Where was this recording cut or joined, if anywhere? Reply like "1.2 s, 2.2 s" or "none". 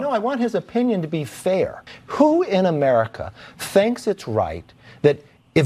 1.8 s